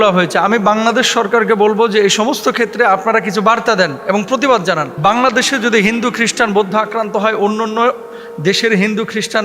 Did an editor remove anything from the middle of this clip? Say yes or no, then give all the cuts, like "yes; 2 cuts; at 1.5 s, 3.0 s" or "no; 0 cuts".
yes; 1 cut; at 4.9 s